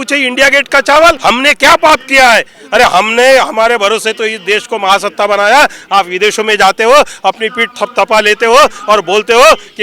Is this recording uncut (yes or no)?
no